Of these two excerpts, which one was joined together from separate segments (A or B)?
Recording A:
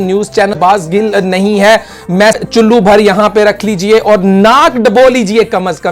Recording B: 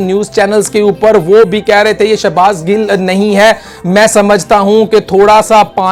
A